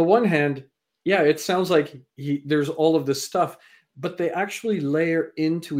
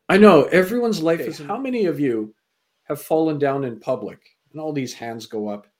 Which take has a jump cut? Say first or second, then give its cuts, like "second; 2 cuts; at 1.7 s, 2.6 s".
second; 1 cut; at 1.3 s